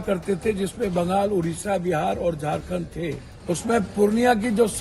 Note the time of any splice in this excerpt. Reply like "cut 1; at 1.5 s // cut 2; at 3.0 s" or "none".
cut 1; at 3.3 s